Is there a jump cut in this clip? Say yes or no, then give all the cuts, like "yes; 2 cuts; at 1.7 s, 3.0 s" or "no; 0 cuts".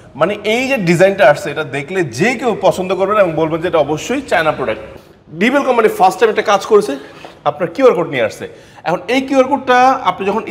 yes; 1 cut; at 4.9 s